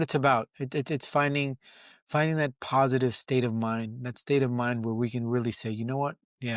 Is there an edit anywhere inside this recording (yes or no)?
no